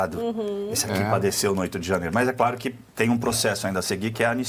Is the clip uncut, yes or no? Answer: yes